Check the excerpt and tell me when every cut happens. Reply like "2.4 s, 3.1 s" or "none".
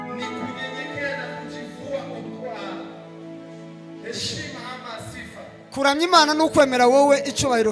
none